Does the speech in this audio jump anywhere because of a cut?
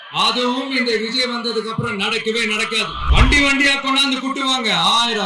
yes; 1 cut; at 3.0 s

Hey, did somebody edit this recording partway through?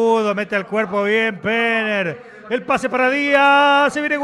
no; 0 cuts

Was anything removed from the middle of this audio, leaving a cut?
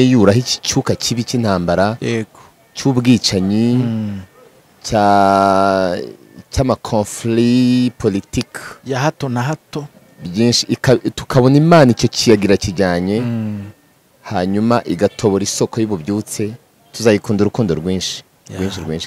no; 0 cuts

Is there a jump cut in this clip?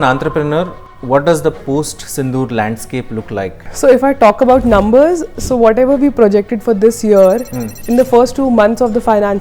yes; 1 cut; at 3.6 s

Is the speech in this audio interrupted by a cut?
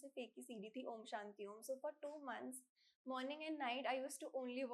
no; 0 cuts

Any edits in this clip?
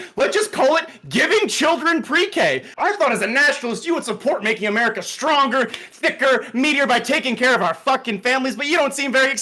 yes; 1 cut; at 2.7 s

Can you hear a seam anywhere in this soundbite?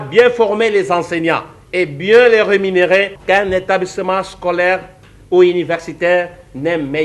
yes; 1 cut; at 3.2 s

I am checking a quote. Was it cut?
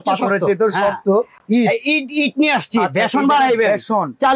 no; 0 cuts

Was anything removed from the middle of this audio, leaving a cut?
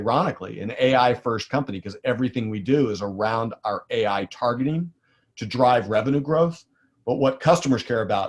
no; 0 cuts

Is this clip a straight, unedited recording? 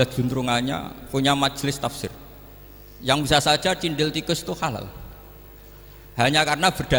yes; 0 cuts

